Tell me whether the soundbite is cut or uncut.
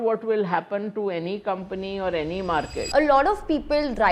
cut